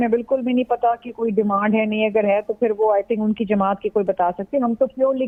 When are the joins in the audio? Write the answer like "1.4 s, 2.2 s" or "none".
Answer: none